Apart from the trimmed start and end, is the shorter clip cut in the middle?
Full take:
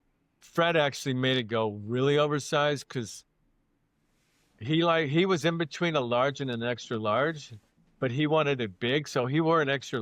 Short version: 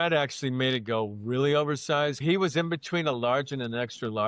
yes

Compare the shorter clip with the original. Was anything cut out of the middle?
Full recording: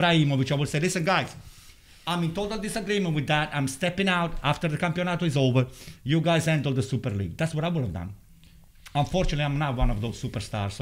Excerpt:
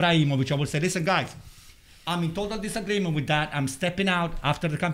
no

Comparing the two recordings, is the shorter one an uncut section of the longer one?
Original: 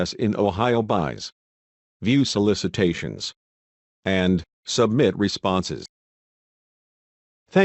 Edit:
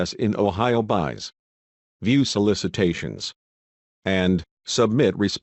yes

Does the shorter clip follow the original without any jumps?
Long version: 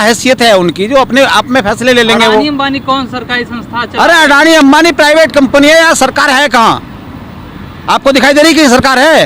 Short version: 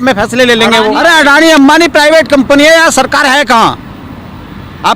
no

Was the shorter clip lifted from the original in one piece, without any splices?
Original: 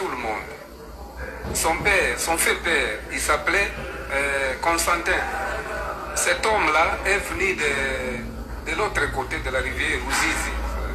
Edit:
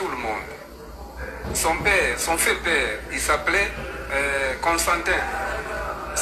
yes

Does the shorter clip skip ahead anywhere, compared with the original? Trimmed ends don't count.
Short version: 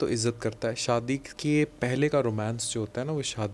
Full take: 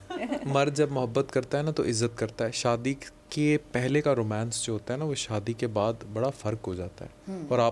yes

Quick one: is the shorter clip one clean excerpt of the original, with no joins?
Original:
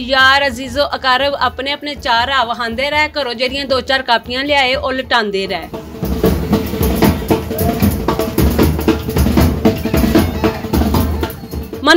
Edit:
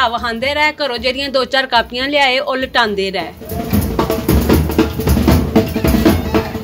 no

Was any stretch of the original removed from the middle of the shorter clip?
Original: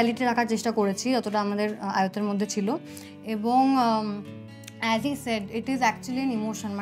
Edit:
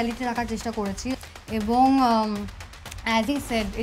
yes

